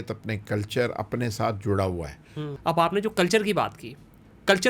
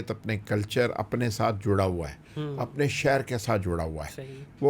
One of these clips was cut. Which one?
first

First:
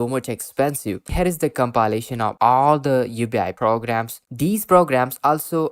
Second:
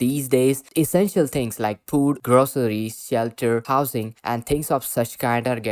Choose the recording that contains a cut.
first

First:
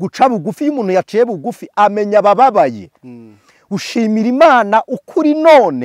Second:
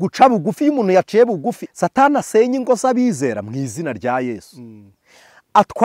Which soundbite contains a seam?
second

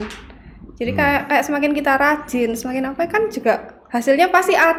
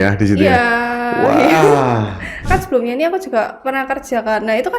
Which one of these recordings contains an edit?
second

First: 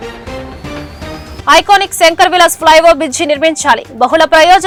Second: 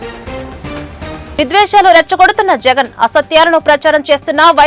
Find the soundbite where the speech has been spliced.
second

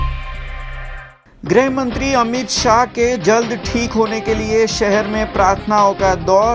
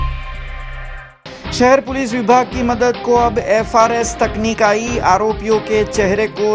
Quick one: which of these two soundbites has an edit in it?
second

